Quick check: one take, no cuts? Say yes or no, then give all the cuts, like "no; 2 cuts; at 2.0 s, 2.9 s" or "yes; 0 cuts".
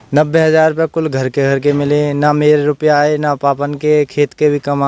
yes; 0 cuts